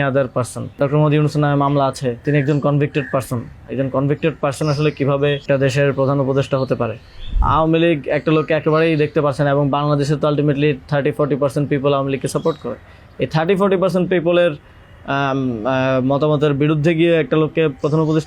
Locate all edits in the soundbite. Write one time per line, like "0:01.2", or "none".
0:00.8
0:02.2
0:05.4
0:07.4

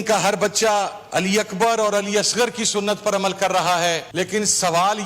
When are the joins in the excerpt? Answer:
0:01.0
0:04.1

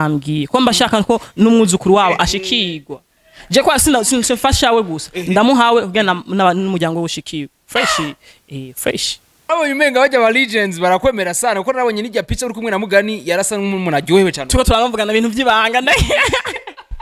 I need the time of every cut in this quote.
0:09.4

